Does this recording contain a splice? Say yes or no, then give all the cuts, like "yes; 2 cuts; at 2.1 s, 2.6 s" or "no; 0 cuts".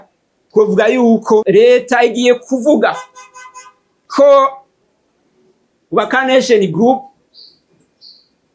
yes; 1 cut; at 1.4 s